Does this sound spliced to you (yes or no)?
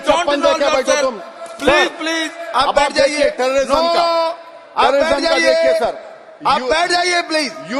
no